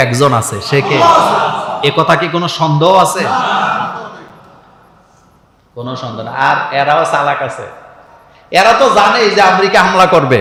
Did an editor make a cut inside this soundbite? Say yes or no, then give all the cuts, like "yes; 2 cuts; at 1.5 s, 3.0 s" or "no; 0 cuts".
no; 0 cuts